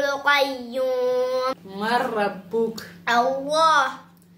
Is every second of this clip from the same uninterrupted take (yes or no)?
no